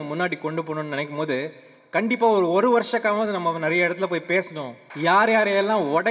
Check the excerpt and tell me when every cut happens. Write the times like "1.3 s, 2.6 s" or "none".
4.8 s